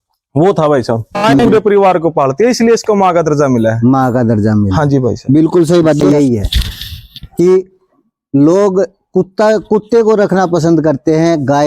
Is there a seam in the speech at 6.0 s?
yes; 2 cuts; at 1.4 s, 6.0 s

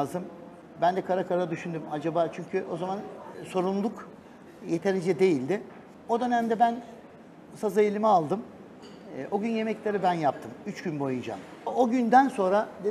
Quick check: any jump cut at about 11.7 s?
yes; 1 cut; at 11.7 s

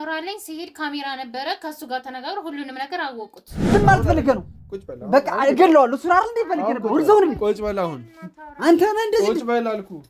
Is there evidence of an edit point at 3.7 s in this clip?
yes; 1 cut; at 3.7 s

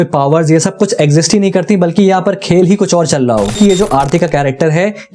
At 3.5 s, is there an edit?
yes; 1 cut; at 3.5 s

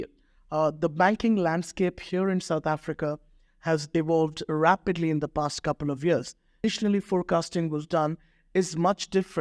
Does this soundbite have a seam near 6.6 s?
yes; 1 cut; at 6.6 s

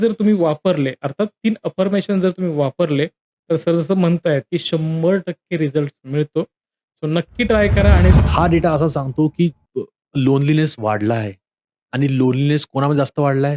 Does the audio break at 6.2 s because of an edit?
no; 1 cut; at 8.2 s

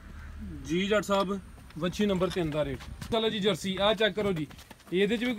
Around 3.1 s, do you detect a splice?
yes; 1 cut; at 3.1 s

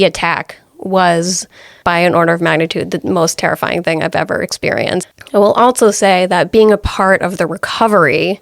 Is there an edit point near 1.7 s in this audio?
yes; 2 cuts; at 1.7 s, 5.1 s

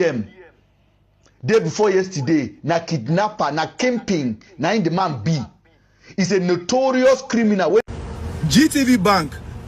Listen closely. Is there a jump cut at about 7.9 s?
yes; 1 cut; at 7.9 s

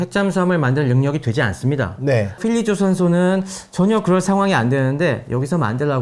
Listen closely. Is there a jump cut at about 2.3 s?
yes; 1 cut; at 2.3 s

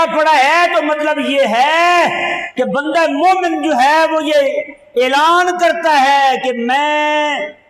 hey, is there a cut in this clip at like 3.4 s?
no; 0 cuts

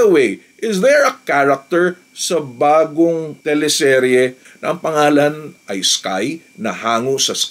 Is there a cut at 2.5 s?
no; 2 cuts; at 4.5 s, 5.6 s

